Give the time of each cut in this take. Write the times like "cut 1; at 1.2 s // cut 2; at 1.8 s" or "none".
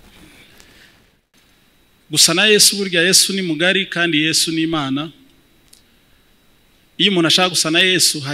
cut 1; at 1.1 s